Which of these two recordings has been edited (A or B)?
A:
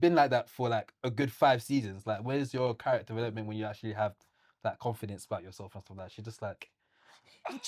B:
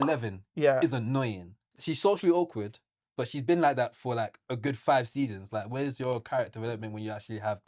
B